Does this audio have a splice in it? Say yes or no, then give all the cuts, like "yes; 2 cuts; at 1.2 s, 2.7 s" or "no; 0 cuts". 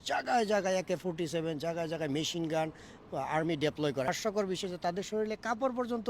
yes; 1 cut; at 4.1 s